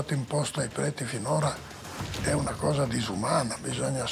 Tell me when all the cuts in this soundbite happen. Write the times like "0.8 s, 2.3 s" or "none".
none